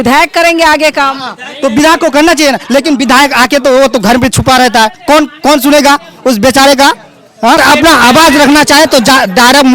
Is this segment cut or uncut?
cut